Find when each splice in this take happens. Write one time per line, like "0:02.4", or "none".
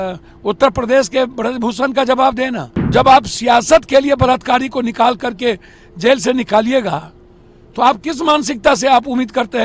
0:02.9